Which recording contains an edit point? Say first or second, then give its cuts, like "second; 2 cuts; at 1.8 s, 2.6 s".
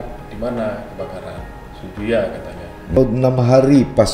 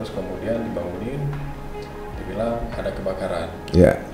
first; 1 cut; at 3.0 s